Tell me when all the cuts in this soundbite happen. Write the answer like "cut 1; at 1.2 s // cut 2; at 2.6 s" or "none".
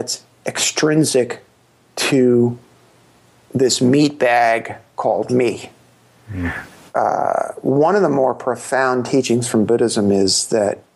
cut 1; at 6.6 s